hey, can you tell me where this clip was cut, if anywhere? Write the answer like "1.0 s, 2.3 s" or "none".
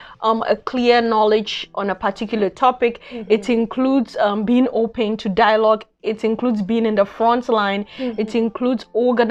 none